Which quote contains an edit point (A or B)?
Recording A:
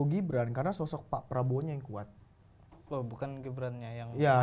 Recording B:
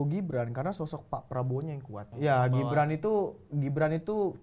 B